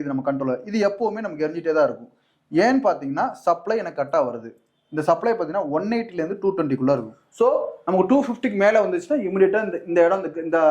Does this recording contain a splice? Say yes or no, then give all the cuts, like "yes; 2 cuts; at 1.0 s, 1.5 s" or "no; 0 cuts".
yes; 1 cut; at 7.2 s